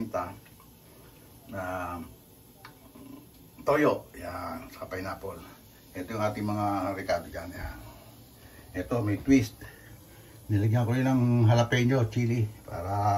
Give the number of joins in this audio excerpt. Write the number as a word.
zero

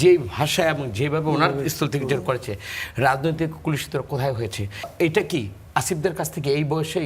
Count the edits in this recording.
one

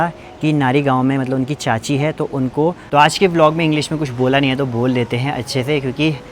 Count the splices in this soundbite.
one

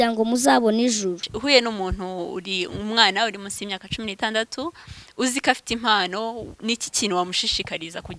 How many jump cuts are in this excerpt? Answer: one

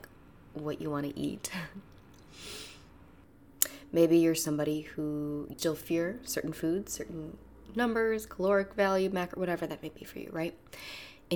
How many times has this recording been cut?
two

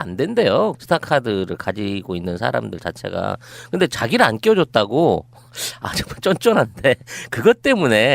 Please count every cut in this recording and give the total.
one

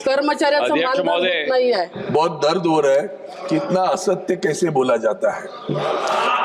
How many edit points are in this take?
one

